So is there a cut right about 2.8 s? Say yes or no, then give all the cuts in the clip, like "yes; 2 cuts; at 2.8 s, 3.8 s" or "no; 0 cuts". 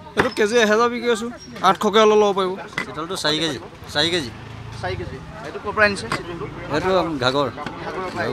yes; 1 cut; at 2.8 s